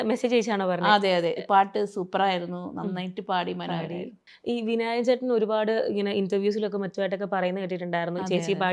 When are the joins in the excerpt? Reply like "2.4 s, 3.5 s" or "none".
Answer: 4.3 s